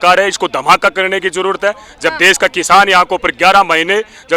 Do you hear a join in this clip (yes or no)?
no